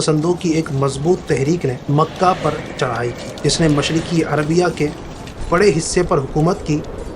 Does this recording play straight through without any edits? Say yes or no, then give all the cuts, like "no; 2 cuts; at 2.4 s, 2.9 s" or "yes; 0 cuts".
no; 2 cuts; at 1.8 s, 3.3 s